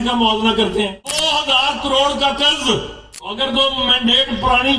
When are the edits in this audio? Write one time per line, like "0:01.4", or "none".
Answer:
0:01.2
0:03.3

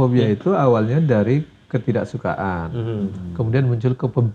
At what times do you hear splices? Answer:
none

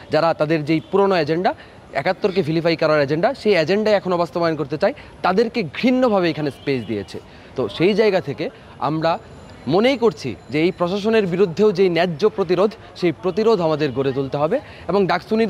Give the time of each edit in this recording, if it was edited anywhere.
none

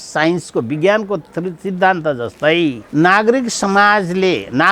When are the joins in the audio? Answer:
0:02.8

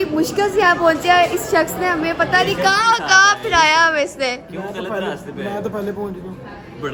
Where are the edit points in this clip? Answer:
none

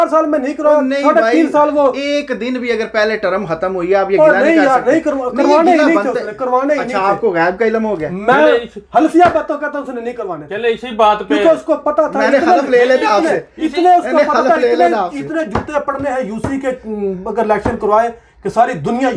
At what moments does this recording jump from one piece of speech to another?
none

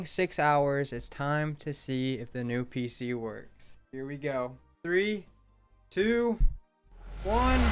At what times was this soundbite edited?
none

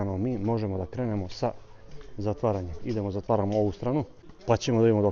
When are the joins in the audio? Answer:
none

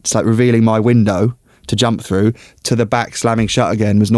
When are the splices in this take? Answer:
none

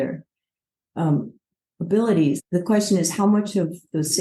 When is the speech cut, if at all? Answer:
0:02.4

